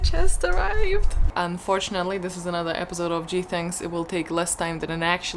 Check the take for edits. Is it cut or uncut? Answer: cut